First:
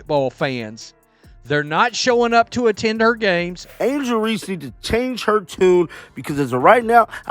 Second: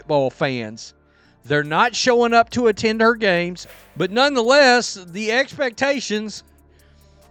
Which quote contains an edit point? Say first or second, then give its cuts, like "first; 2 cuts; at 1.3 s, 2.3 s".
first; 1 cut; at 3.6 s